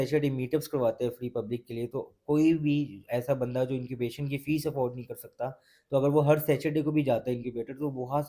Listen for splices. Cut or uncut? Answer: uncut